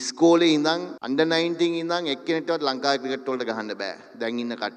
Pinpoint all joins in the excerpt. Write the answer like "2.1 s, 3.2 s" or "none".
0.9 s